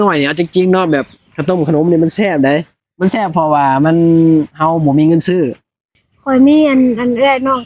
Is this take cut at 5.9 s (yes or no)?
yes